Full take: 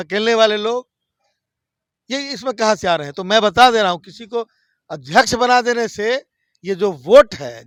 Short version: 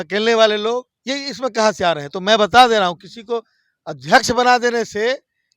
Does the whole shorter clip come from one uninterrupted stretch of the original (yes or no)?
no